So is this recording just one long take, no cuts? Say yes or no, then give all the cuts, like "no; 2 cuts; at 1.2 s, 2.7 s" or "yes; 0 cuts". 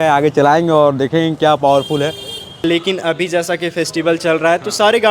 no; 1 cut; at 2.6 s